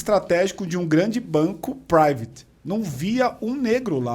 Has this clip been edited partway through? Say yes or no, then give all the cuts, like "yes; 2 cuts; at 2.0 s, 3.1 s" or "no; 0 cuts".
no; 0 cuts